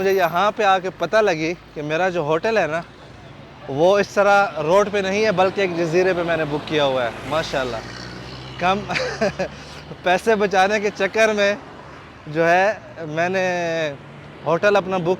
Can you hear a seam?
no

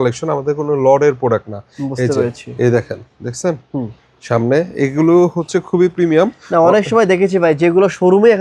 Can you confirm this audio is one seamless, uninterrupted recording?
yes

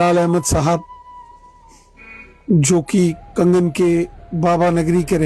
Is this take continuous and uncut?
yes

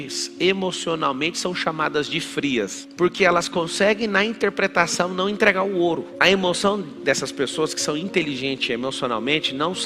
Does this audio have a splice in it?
yes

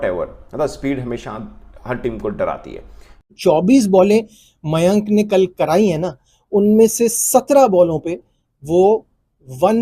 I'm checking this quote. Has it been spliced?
yes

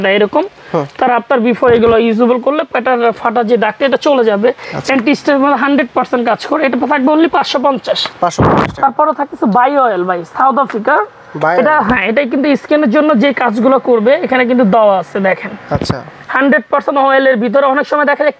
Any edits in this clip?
no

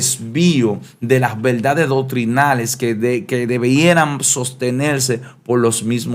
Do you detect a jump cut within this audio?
no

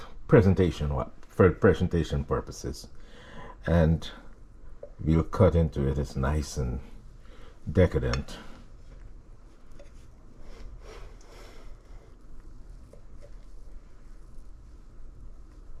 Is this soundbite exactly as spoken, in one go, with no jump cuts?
yes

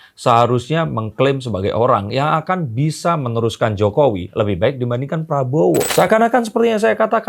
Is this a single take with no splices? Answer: no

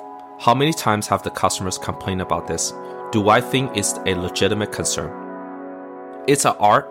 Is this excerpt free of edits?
no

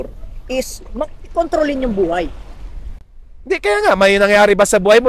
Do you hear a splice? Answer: no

